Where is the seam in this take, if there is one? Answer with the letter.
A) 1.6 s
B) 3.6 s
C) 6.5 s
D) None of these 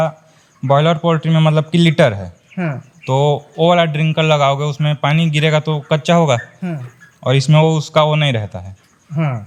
D